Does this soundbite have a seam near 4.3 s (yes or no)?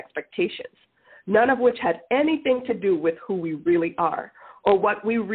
no